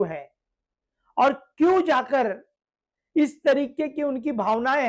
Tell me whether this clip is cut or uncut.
uncut